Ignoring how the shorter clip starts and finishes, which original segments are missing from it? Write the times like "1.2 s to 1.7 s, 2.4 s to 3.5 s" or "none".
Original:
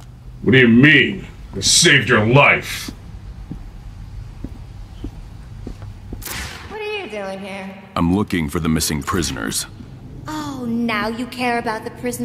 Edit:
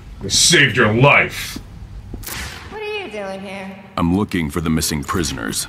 3.2 s to 5.9 s